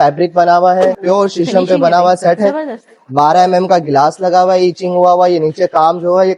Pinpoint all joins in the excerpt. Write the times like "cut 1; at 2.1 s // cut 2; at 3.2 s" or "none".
cut 1; at 1.0 s